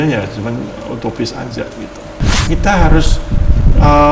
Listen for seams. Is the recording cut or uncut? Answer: cut